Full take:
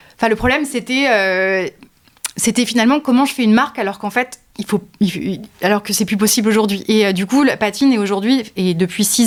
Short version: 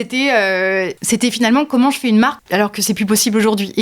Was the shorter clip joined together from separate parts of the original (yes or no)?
yes